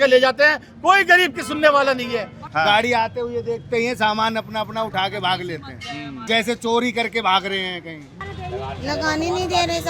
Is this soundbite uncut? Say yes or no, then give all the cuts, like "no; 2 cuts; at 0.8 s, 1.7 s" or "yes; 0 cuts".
no; 3 cuts; at 2.4 s, 6.2 s, 8.2 s